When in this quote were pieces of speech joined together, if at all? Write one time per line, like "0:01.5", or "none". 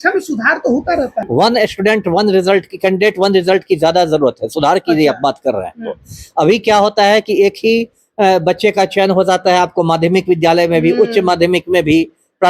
0:01.1